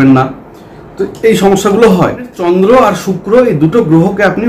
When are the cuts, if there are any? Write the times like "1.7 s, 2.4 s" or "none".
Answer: 2.4 s

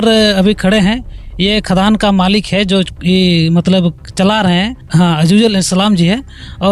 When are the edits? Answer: 4.8 s

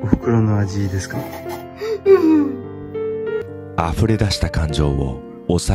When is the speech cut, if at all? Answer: 3.4 s

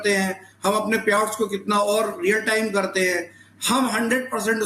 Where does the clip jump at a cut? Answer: none

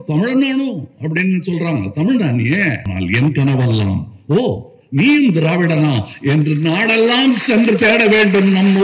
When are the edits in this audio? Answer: 2.8 s

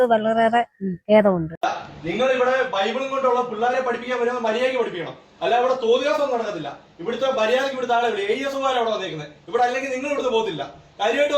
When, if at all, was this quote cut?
1.5 s

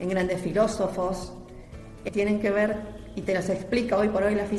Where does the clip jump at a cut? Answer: 2.0 s

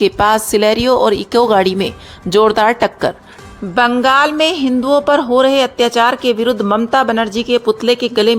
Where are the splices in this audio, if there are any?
3.3 s

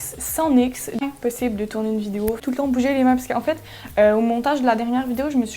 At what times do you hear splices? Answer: 1.0 s, 2.4 s

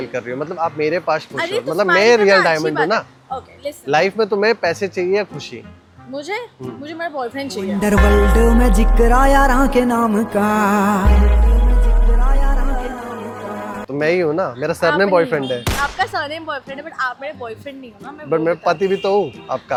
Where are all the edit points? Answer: none

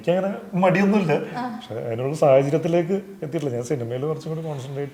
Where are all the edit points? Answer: none

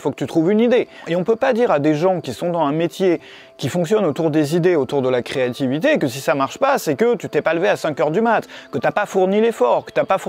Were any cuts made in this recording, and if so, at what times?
1.0 s

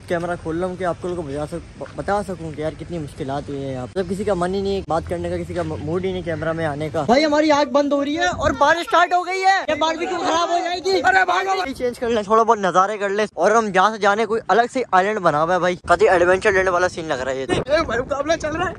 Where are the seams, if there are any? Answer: 7.0 s, 11.7 s, 17.5 s

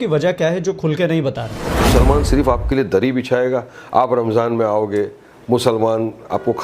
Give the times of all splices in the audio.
1.8 s

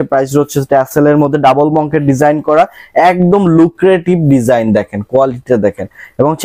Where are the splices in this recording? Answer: none

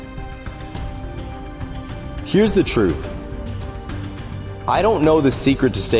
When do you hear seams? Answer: none

